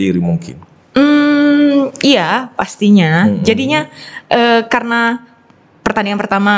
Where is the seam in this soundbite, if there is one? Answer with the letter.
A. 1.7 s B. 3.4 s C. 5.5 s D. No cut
D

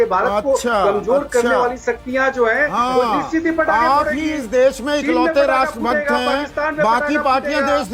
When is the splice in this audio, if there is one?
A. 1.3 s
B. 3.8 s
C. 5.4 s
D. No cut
D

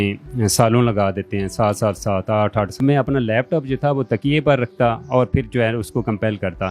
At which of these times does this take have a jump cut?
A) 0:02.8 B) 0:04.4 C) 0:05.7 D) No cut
A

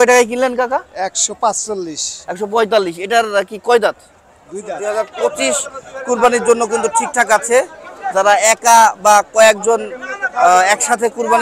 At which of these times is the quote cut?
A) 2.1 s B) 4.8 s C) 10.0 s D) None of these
B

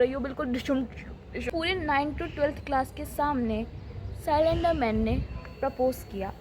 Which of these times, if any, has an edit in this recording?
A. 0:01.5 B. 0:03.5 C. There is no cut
A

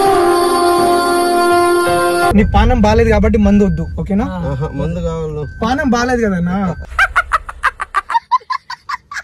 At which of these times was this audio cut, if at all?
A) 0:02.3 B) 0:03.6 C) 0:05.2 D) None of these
A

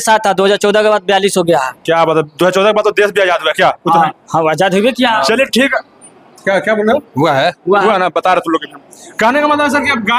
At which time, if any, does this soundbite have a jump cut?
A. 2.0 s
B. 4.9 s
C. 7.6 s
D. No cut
D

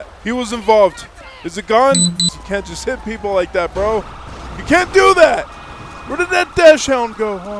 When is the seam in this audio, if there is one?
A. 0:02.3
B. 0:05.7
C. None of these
A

